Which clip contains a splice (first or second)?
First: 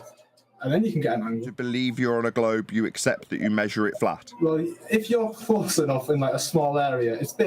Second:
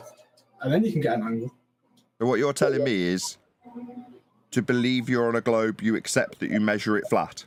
first